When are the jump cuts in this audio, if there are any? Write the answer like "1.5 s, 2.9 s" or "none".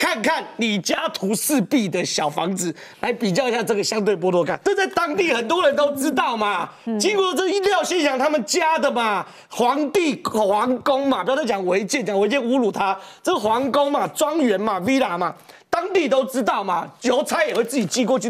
4.6 s